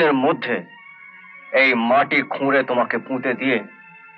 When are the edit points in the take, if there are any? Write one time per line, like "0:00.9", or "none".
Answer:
none